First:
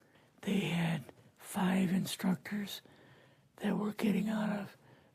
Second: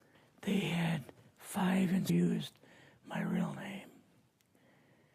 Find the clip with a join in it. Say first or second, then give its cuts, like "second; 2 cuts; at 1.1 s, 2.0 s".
first; 1 cut; at 2.1 s